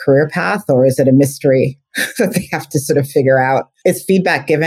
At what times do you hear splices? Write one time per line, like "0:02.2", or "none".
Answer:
0:03.7